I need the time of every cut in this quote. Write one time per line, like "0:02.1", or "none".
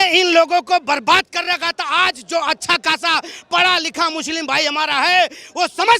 none